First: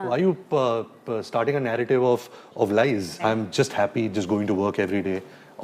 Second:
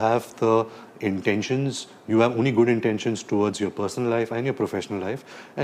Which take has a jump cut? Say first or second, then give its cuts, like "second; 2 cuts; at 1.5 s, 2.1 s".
first; 1 cut; at 3.2 s